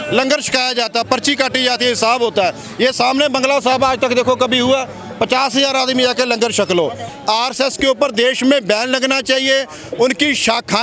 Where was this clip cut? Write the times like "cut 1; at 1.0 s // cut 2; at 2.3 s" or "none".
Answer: cut 1; at 7.1 s